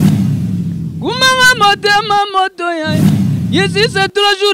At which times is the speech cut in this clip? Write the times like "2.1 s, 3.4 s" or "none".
0.9 s